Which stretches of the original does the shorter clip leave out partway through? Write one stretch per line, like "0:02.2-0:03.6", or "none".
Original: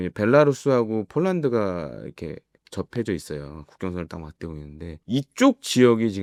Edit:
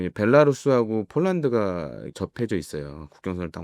0:02.0-0:02.6